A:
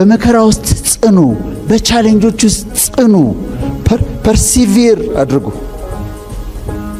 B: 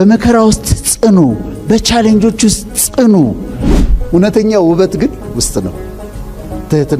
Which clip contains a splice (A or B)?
B